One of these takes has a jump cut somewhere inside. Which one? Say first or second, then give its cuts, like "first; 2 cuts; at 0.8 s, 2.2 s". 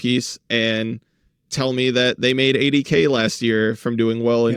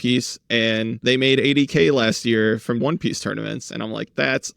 second; 2 cuts; at 1.0 s, 2.8 s